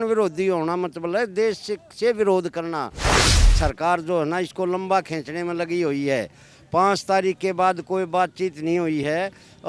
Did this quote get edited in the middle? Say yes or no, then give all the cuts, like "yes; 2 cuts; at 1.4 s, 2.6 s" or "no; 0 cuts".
yes; 1 cut; at 3.3 s